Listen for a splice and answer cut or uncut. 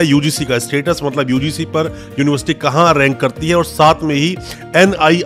uncut